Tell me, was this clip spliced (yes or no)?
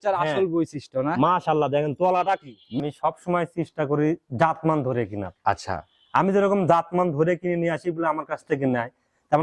yes